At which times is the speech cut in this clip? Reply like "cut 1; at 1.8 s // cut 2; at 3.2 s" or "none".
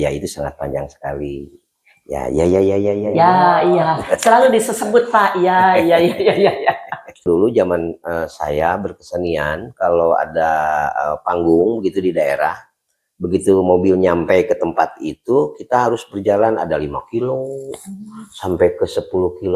cut 1; at 3.1 s // cut 2; at 7.2 s